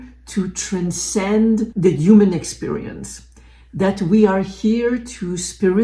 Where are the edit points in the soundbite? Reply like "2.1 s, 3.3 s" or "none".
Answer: none